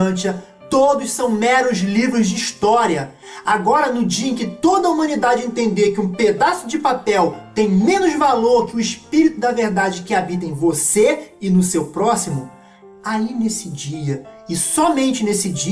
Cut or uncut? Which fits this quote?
uncut